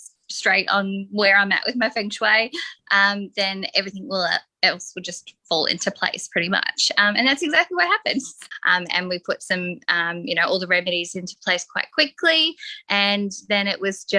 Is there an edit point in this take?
yes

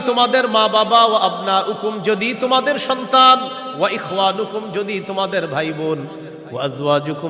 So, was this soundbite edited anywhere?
no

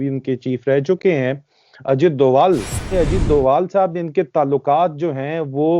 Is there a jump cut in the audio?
yes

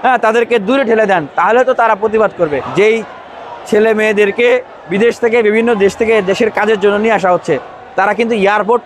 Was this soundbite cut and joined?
yes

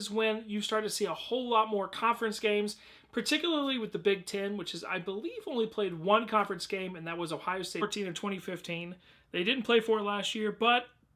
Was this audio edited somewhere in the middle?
no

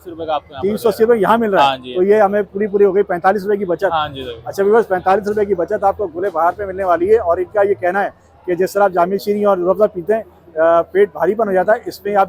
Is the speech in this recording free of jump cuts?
yes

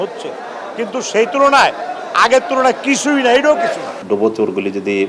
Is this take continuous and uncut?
no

